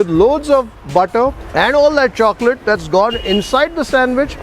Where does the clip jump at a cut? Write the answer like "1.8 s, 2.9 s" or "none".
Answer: 1.4 s